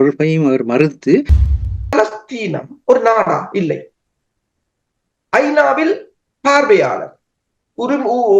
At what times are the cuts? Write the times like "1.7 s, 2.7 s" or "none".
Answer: 1.4 s